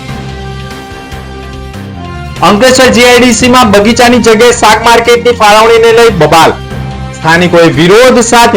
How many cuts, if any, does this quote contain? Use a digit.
1